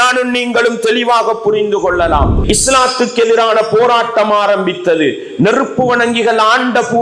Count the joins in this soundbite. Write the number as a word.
one